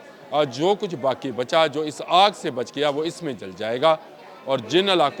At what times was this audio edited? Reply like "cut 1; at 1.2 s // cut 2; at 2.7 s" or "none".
none